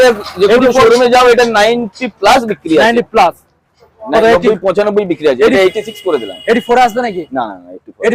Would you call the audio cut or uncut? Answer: uncut